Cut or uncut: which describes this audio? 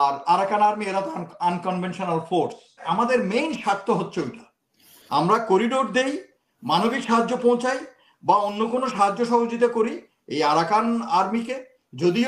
cut